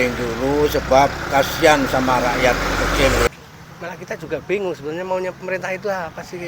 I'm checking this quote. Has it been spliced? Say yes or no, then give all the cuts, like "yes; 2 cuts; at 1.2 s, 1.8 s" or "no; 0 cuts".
yes; 1 cut; at 3.3 s